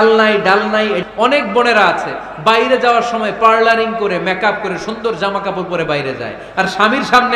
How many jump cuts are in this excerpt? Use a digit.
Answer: 1